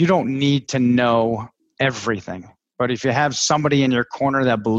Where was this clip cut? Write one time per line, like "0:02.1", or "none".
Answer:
0:01.6